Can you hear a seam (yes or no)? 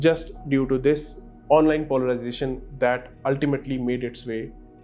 no